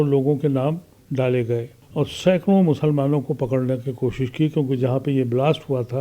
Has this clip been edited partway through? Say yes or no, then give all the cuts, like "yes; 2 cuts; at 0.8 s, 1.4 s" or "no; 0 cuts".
yes; 1 cut; at 1.8 s